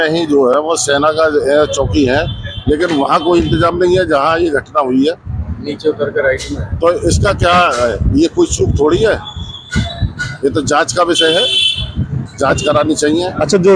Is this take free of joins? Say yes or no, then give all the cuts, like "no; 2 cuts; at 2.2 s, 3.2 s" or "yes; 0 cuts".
yes; 0 cuts